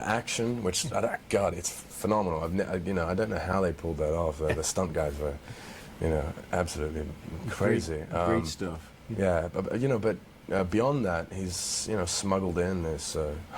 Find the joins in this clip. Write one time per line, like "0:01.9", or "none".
0:06.7